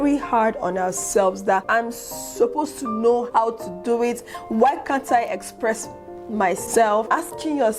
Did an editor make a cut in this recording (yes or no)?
yes